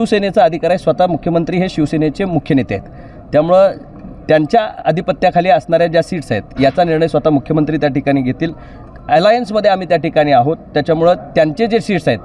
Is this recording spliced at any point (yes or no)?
no